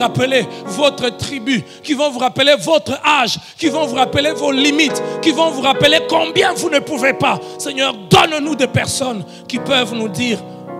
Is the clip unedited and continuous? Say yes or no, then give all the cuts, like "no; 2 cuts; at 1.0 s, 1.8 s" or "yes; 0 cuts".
yes; 0 cuts